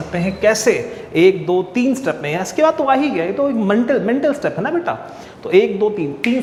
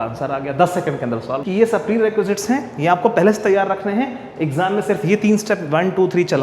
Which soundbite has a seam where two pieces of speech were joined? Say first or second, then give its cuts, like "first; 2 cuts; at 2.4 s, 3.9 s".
second; 1 cut; at 1.4 s